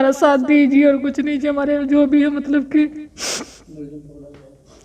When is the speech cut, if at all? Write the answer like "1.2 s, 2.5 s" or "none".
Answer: none